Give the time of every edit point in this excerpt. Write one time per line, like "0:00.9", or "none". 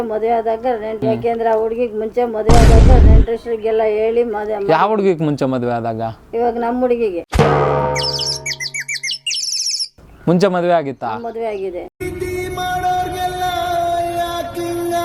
none